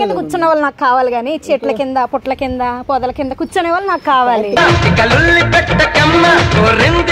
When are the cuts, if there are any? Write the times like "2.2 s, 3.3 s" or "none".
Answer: none